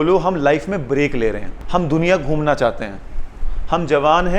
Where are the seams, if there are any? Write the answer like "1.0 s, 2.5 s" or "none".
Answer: 1.5 s